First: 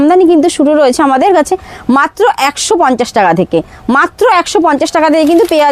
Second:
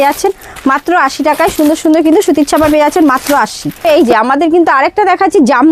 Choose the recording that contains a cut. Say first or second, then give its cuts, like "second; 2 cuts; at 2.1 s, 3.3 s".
second; 1 cut; at 3.8 s